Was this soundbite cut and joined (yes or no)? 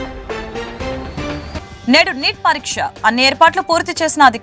yes